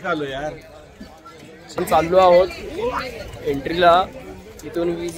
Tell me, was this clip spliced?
yes; 1 cut; at 1.8 s

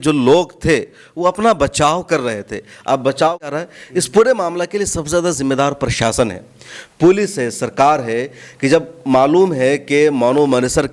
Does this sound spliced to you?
yes; 1 cut; at 3.5 s

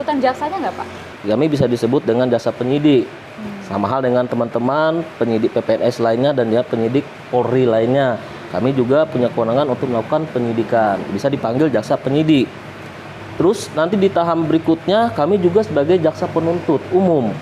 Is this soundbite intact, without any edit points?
no; 1 cut; at 1.0 s

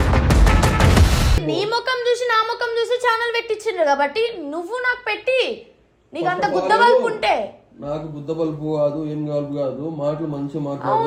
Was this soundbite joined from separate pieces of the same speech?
no; 0 cuts

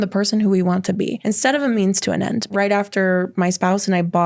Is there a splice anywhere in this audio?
yes; 2 cuts; at 1.2 s, 2.5 s

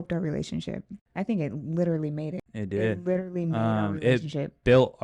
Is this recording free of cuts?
no; 2 cuts; at 0.9 s, 2.5 s

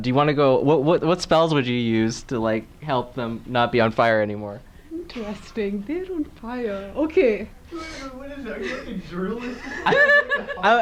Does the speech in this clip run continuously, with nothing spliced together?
yes; 0 cuts

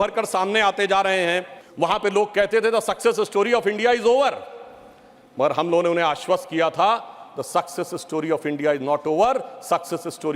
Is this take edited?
yes; 1 cut; at 1.6 s

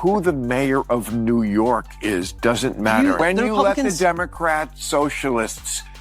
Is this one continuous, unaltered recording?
no; 1 cut; at 3.3 s

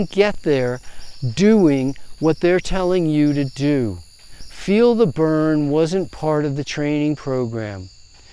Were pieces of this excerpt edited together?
no; 0 cuts

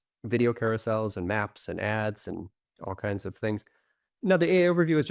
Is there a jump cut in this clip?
yes; 1 cut; at 4.1 s

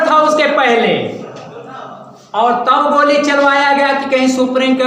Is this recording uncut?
yes; 0 cuts

